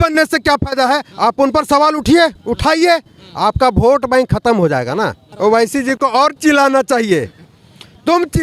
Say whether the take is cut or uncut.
cut